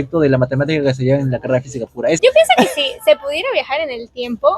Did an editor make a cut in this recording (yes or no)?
yes